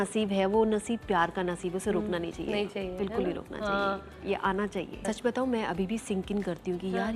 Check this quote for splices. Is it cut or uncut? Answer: uncut